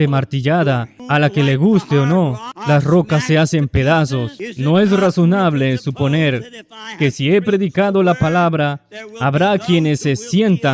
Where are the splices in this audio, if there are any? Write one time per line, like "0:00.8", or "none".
0:00.9
0:02.5
0:04.4